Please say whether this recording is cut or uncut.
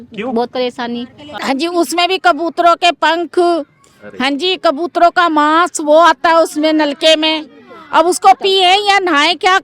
cut